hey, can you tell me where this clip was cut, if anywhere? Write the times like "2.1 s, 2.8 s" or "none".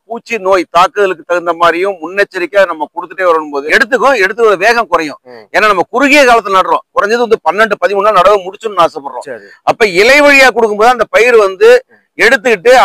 3.5 s